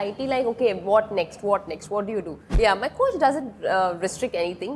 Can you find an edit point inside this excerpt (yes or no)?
yes